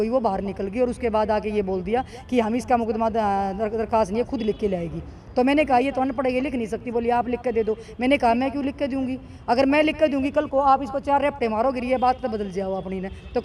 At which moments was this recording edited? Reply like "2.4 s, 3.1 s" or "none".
none